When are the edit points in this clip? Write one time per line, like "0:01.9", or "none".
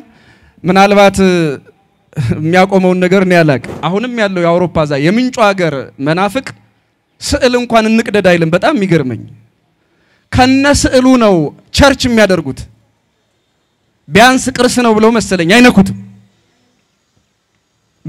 0:03.7